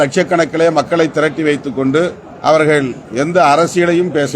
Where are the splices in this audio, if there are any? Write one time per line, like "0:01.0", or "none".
0:02.3
0:03.0